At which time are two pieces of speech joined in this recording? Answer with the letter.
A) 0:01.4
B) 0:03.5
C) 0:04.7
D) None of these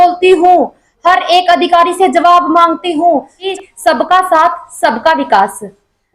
B